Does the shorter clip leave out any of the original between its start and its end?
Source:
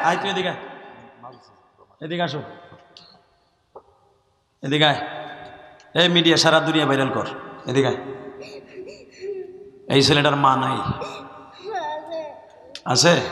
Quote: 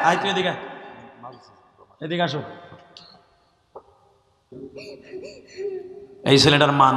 yes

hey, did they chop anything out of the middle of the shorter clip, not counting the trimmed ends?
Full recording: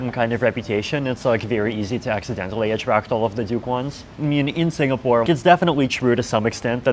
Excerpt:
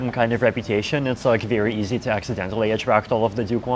no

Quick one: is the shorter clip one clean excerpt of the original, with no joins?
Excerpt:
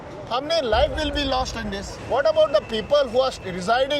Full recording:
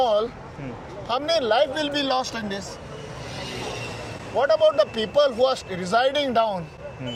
no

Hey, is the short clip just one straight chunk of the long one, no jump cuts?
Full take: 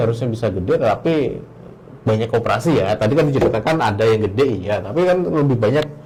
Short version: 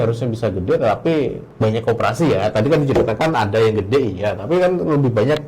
no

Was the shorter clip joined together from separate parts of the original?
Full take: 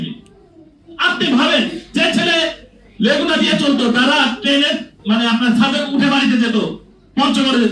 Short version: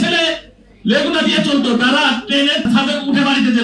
yes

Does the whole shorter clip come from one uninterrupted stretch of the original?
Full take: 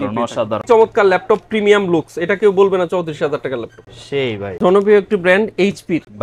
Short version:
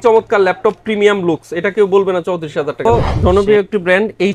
no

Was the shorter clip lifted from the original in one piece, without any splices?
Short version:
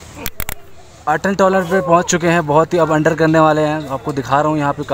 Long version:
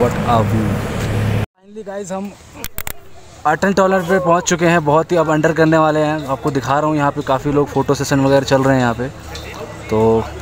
yes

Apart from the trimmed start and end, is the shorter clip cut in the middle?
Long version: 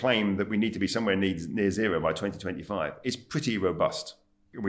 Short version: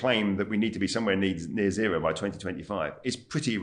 no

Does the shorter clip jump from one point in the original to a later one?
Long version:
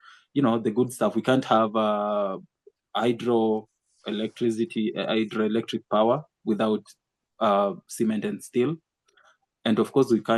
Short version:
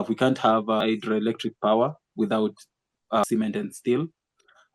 yes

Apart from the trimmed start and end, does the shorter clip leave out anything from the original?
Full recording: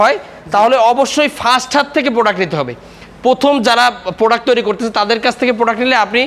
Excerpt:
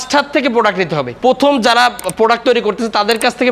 yes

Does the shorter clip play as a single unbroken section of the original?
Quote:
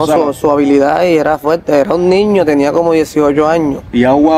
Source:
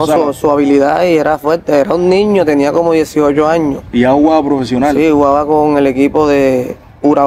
yes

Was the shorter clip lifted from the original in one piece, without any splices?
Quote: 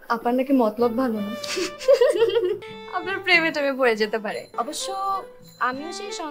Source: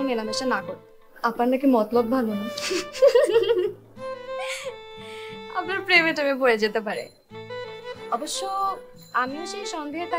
no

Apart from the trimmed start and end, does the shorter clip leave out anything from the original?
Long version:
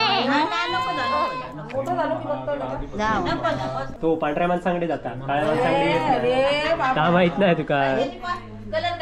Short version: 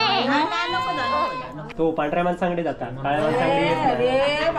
yes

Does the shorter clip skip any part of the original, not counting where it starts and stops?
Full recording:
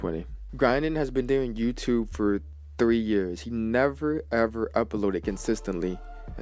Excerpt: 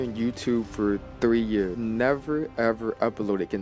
yes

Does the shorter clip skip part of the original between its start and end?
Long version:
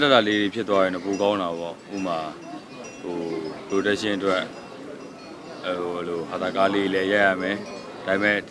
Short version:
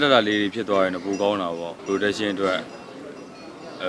yes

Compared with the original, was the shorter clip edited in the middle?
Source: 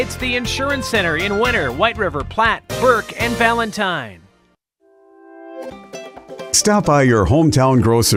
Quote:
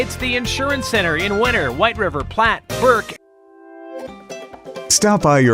yes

